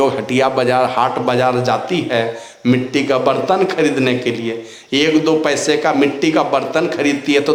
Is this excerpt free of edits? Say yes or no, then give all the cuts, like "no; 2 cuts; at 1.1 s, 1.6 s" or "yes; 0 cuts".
yes; 0 cuts